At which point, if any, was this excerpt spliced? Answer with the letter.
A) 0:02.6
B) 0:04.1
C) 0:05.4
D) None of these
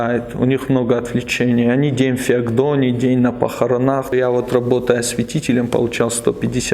B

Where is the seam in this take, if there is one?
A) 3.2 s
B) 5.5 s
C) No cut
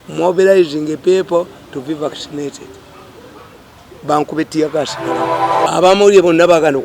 B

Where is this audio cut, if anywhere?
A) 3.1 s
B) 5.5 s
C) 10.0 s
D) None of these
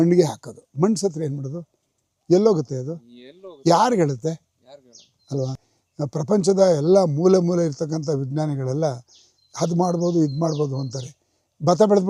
B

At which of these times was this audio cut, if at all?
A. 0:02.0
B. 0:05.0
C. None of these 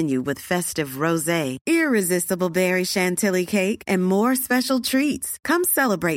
C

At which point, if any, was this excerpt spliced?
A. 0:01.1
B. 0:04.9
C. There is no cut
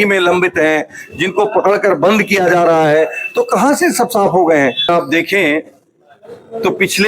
B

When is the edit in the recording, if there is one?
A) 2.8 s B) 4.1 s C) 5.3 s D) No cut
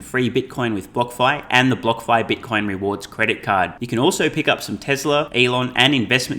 C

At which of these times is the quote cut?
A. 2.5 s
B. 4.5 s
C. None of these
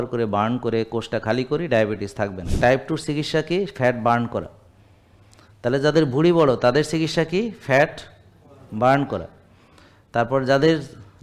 A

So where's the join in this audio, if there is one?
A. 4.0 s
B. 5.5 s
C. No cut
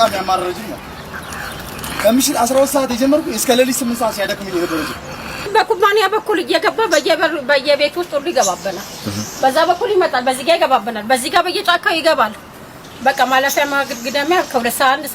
B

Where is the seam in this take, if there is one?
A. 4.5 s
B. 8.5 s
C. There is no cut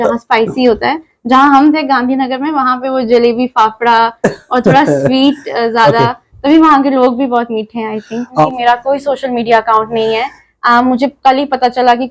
B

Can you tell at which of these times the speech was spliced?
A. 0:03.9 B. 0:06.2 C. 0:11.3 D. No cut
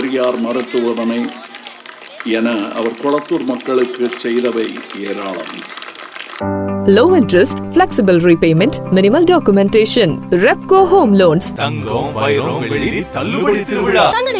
B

